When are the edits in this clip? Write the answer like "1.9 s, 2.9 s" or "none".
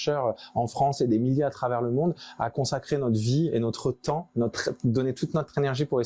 none

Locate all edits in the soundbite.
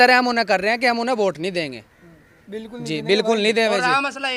none

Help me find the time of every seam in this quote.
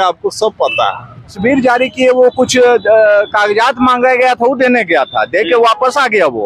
1.4 s

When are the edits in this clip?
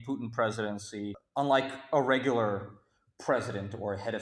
1.2 s

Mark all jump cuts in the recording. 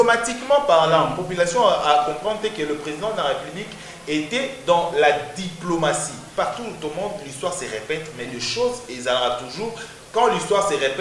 6.2 s

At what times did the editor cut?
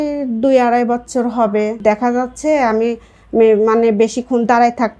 1.8 s

